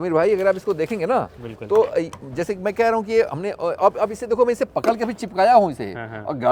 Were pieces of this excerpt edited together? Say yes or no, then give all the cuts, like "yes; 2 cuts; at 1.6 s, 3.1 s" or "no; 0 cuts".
no; 0 cuts